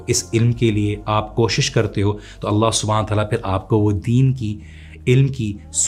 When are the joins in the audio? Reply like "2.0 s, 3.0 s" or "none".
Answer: none